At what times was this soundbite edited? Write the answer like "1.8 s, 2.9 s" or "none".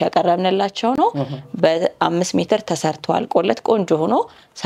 none

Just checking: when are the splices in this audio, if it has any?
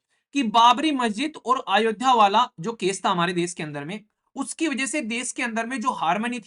none

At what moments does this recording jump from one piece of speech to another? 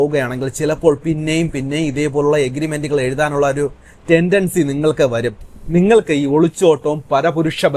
none

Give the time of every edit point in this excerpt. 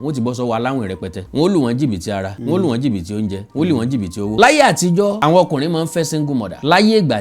1.2 s, 4.3 s

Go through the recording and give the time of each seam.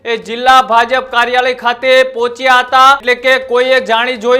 3.0 s

